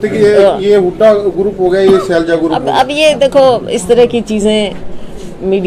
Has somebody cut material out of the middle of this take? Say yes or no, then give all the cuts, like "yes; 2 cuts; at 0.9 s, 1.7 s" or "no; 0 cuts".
no; 0 cuts